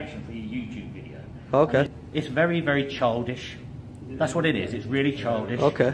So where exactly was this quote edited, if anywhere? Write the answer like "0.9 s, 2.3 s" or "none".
1.9 s

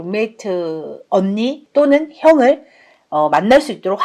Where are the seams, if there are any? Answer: 1.6 s

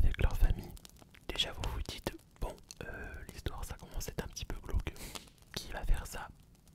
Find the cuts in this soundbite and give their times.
1.0 s

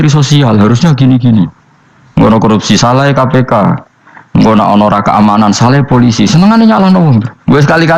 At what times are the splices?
none

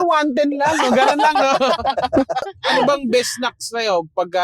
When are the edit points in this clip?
2.5 s

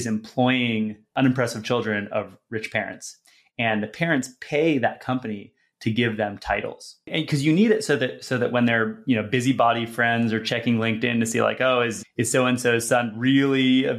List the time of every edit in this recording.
1.1 s, 7.1 s, 12.0 s

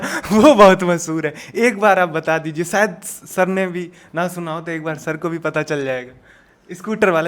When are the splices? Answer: none

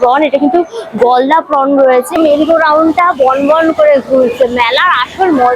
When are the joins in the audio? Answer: 2.2 s

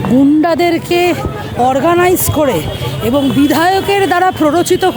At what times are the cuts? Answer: none

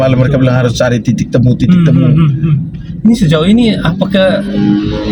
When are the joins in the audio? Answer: none

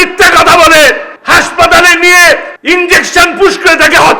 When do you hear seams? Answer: 1.1 s, 2.5 s

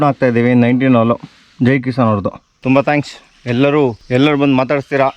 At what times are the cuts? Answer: none

